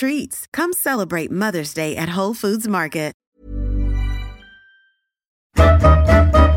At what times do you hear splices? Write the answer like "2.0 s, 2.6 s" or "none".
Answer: 5.6 s